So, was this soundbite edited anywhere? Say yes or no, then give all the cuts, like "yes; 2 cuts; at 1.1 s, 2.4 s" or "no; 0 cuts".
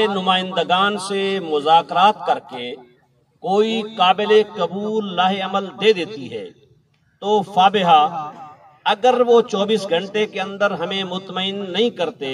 no; 0 cuts